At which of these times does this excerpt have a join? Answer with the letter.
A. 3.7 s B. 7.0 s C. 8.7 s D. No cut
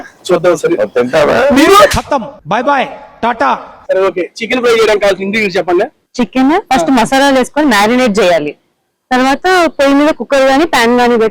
A